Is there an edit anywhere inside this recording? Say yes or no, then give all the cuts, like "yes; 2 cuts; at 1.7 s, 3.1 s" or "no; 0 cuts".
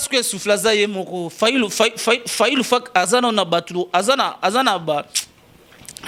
no; 0 cuts